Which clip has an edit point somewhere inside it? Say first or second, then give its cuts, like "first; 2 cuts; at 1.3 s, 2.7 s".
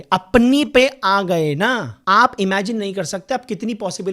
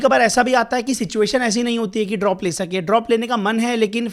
first; 1 cut; at 1.9 s